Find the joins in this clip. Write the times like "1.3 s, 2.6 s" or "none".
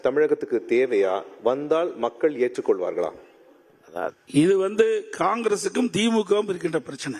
none